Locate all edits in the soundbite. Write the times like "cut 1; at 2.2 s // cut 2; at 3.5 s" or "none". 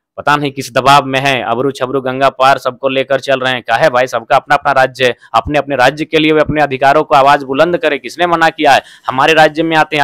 none

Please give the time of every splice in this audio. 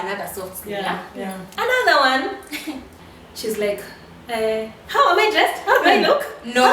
cut 1; at 1.4 s // cut 2; at 2.9 s

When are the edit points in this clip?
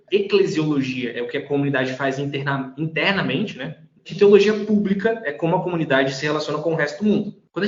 cut 1; at 4.1 s

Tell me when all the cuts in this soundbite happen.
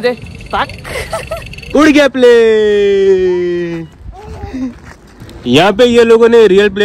cut 1; at 1.6 s // cut 2; at 5.0 s

